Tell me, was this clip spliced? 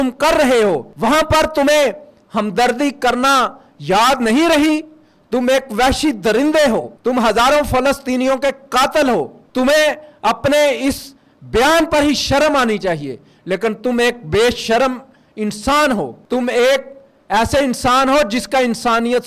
yes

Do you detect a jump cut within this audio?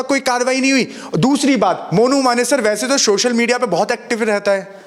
no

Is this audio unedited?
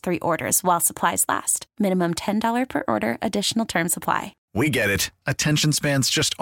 no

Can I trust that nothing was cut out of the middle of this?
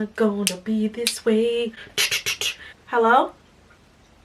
no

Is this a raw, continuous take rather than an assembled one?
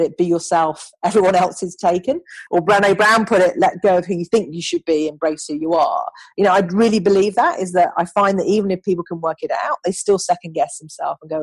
no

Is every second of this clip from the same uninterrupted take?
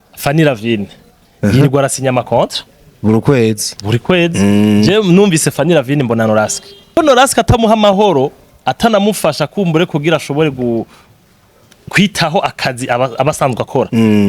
no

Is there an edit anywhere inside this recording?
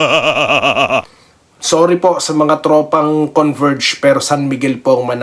yes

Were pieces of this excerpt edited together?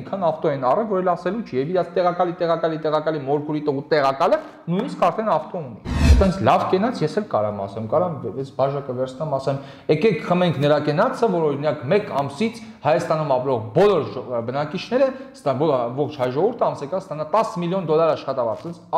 yes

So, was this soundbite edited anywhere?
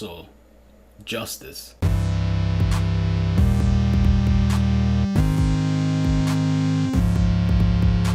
no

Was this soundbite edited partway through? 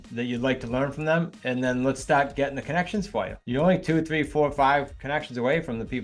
yes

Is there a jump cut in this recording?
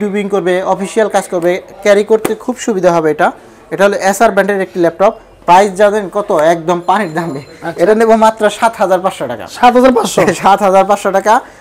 no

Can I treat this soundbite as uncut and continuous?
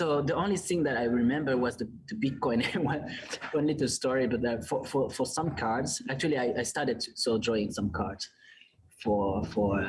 yes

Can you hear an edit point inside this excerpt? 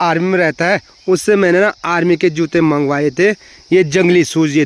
no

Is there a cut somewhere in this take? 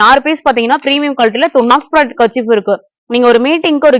yes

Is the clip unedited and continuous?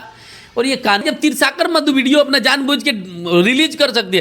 no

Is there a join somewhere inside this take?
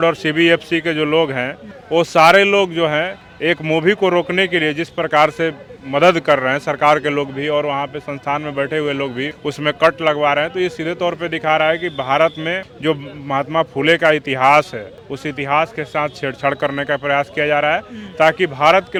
no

